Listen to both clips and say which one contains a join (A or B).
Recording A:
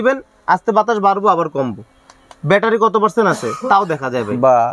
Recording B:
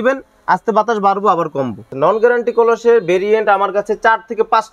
B